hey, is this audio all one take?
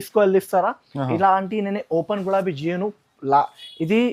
yes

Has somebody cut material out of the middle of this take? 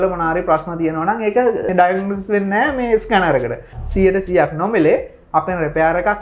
yes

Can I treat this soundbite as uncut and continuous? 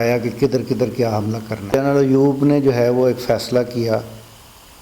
no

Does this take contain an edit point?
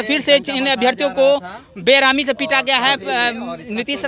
no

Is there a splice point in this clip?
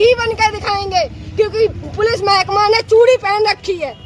no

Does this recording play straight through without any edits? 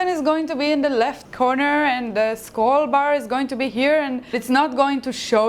no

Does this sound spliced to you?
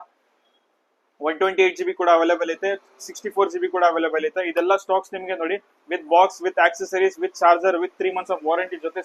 no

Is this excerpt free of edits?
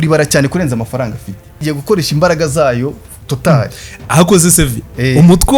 no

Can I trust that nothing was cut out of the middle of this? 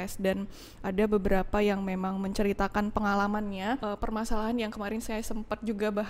no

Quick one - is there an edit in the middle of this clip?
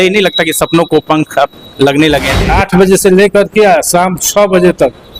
yes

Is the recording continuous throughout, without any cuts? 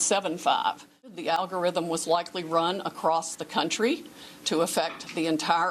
no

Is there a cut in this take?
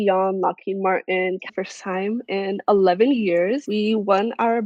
yes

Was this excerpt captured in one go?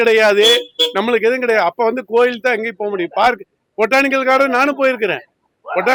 yes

